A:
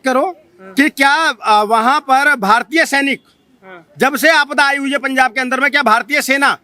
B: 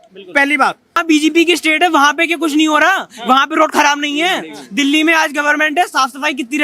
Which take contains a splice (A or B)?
B